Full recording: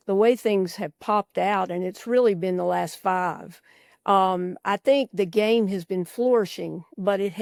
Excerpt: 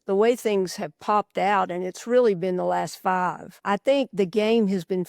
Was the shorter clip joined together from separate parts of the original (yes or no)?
yes